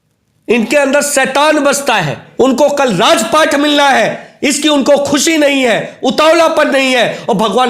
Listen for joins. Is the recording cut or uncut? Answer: cut